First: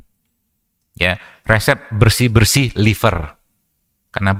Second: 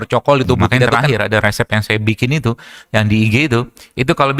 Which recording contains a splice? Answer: second; 1 cut; at 1.0 s

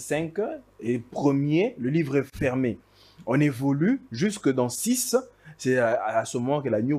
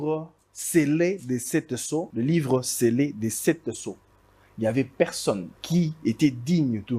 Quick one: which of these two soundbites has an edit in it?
second; 2 cuts; at 2.1 s, 5.5 s

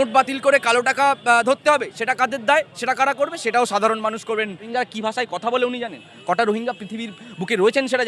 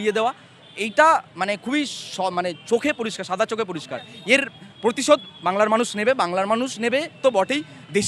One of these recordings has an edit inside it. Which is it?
first; 1 cut; at 4.7 s

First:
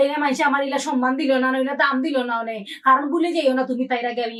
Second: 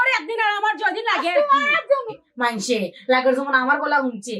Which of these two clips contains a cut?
second; 1 cut; at 2.2 s

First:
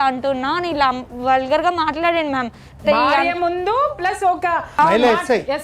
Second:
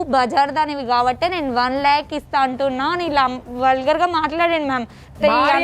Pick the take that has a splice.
first; 1 cut; at 4.7 s

